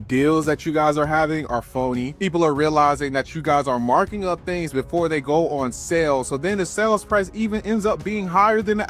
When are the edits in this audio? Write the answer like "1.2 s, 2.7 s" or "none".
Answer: none